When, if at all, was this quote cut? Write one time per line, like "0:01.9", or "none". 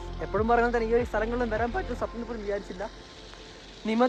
none